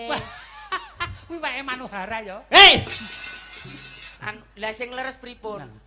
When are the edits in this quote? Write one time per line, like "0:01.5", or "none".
0:04.1